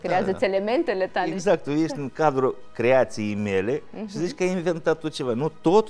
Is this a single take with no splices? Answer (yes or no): no